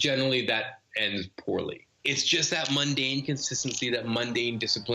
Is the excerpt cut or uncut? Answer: cut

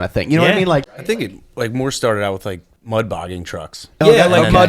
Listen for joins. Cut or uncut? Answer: cut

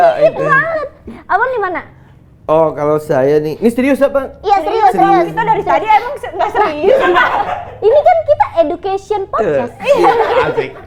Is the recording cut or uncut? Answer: uncut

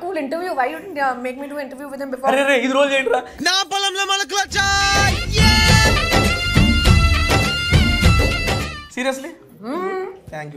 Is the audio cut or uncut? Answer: uncut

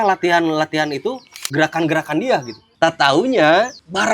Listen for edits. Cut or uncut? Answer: cut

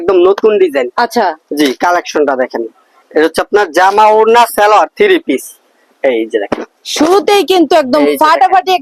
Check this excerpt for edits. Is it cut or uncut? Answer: uncut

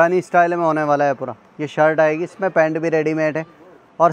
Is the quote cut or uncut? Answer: uncut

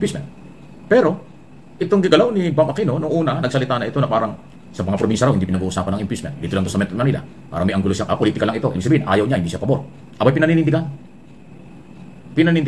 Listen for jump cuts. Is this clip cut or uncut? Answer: cut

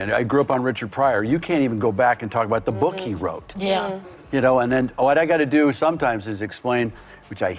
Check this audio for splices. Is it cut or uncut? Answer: uncut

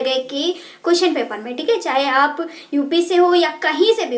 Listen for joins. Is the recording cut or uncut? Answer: uncut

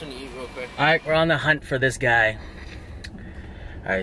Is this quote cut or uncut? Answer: cut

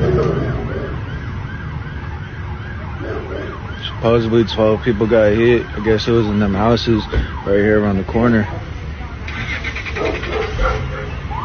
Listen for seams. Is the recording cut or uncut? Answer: uncut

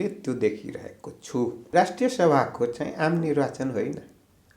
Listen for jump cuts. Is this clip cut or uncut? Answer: cut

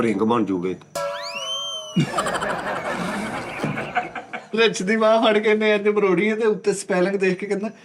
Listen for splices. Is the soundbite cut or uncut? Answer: cut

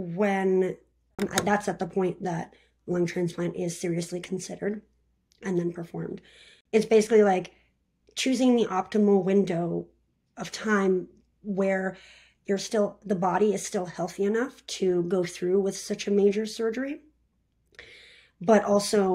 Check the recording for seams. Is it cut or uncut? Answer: cut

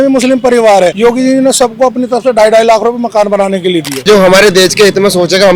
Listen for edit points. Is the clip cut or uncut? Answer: cut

